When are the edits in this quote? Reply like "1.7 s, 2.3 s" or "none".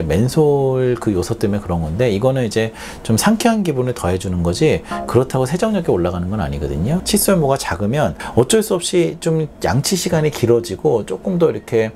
7.0 s